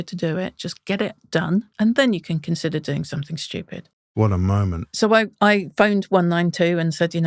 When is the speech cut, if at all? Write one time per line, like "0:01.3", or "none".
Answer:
0:01.7
0:04.8